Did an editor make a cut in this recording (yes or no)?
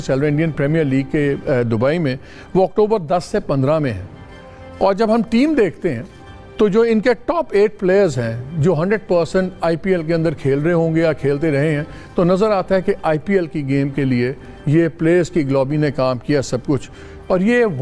no